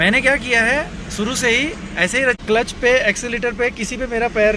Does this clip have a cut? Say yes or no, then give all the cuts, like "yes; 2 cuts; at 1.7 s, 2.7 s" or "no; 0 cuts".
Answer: yes; 1 cut; at 2.4 s